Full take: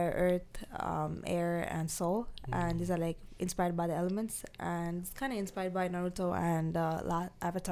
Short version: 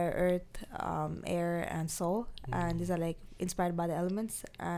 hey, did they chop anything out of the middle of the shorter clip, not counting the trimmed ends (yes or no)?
no